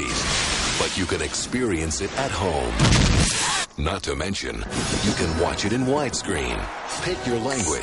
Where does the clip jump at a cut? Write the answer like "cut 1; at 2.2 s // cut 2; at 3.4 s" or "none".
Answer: cut 1; at 6.2 s